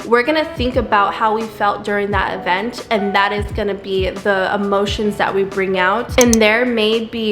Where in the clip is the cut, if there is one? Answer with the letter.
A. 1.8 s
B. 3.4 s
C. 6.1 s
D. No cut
C